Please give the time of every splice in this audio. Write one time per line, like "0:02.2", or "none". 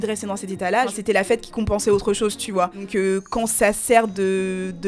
0:01.0
0:02.8